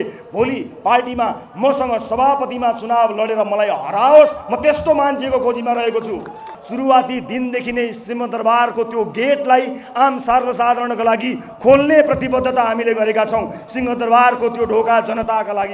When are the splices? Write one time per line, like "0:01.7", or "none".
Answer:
0:06.6